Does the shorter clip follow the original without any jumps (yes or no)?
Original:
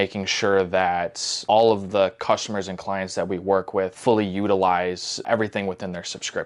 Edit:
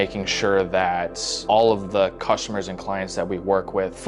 yes